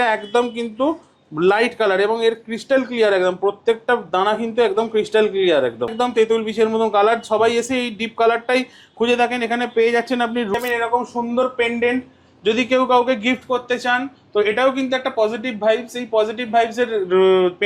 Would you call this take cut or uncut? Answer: cut